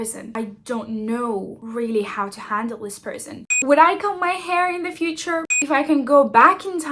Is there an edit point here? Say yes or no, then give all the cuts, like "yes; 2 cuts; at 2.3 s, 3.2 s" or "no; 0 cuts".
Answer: yes; 2 cuts; at 3.3 s, 5.4 s